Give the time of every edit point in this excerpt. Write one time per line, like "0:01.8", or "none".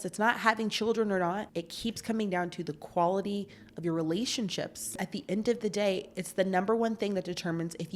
0:01.6
0:04.9